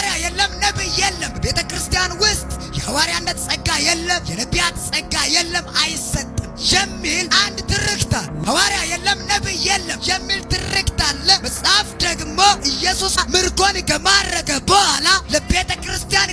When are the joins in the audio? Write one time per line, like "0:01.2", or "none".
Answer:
none